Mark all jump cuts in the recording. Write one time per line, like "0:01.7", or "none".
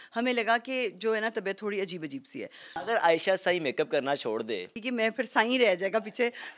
0:02.7
0:04.8